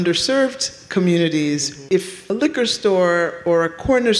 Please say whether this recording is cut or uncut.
cut